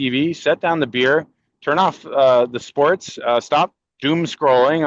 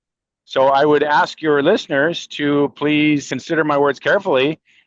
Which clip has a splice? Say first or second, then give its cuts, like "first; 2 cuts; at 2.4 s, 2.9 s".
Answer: second; 1 cut; at 3.3 s